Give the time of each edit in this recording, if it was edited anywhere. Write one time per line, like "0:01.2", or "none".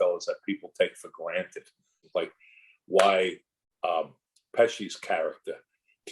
0:01.9